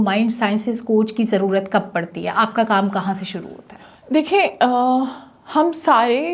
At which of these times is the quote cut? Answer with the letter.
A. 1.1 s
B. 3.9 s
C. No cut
C